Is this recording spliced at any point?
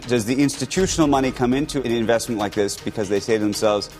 yes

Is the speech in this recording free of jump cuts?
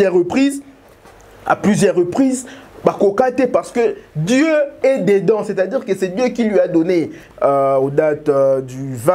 no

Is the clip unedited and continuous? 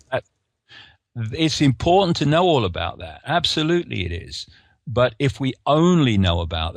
yes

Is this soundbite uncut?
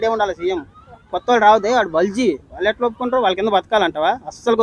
yes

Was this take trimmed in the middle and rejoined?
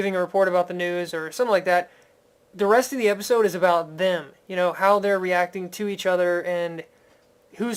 no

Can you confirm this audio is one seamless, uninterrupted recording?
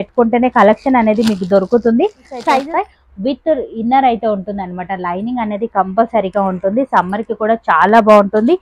no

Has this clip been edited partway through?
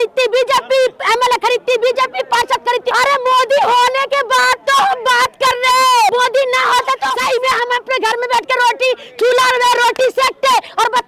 yes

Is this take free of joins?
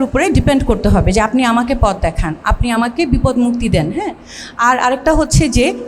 yes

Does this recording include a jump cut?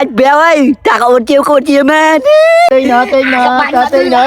yes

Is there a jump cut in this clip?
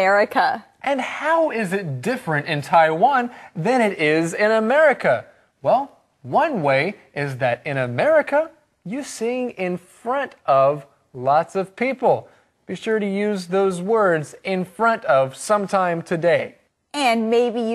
no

